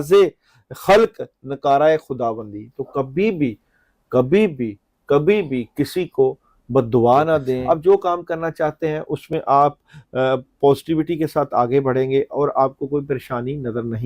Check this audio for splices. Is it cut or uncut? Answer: cut